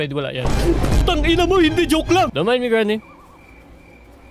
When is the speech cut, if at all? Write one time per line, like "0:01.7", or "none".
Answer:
0:02.3